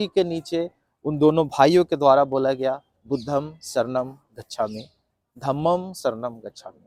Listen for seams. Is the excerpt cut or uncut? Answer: uncut